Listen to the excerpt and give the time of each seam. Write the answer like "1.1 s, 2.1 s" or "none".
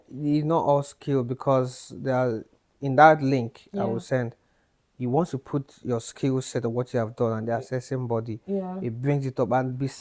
none